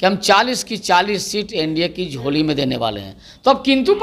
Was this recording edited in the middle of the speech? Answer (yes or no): no